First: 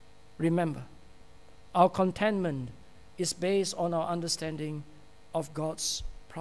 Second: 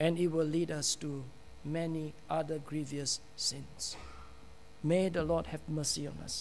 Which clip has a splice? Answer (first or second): second